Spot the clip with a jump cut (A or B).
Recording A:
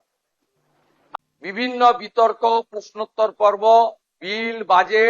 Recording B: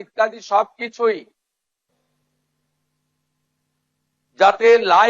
A